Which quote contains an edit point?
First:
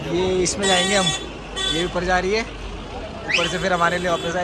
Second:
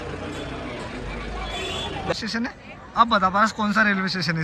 second; 1 cut; at 2.1 s

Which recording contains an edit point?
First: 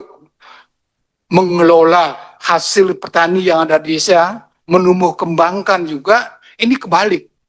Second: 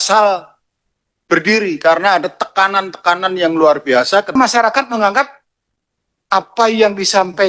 second; 1 cut; at 4.3 s

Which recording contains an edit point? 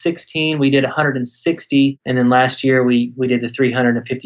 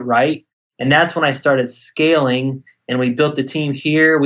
first; 1 cut; at 2.0 s

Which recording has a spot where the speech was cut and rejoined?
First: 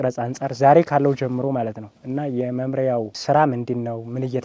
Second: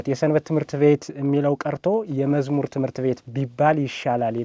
first; 1 cut; at 3.1 s

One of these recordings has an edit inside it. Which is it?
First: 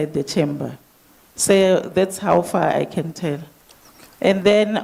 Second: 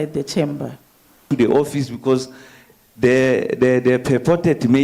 second; 1 cut; at 1.2 s

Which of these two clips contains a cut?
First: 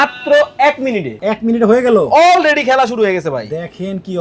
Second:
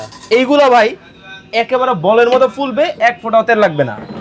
first; 1 cut; at 1.2 s

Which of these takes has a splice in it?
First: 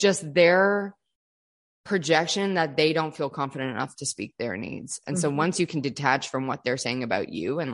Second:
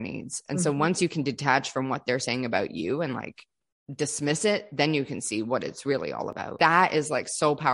second; 1 cut; at 6.6 s

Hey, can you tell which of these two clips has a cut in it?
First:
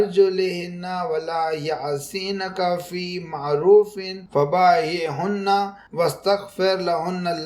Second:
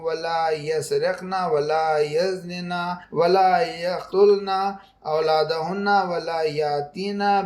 second; 2 cuts; at 3.0 s, 3.9 s

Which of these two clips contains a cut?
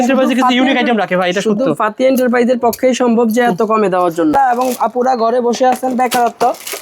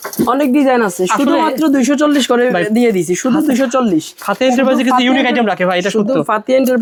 first; 1 cut; at 4.3 s

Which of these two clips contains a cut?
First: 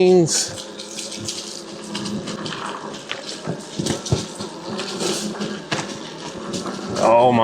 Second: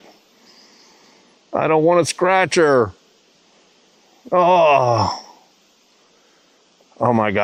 first; 1 cut; at 2.4 s

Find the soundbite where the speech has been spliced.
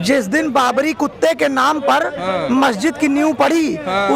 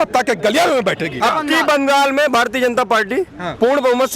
second; 1 cut; at 1.2 s

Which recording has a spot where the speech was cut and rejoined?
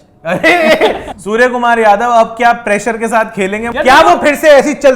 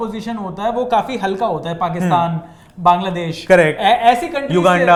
first; 2 cuts; at 1.1 s, 3.7 s

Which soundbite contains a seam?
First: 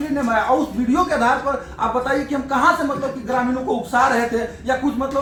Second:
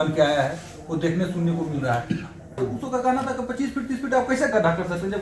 second; 1 cut; at 2.6 s

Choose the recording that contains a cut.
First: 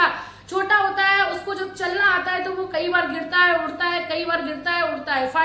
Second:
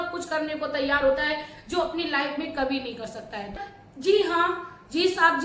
second; 1 cut; at 3.6 s

